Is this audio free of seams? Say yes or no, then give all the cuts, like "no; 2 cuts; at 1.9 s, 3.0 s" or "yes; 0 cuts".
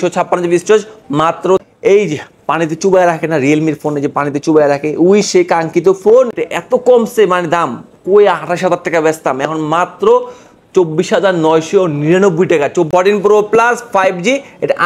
no; 3 cuts; at 1.7 s, 6.3 s, 12.9 s